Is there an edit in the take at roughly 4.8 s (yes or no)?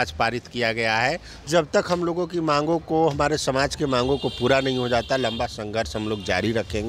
no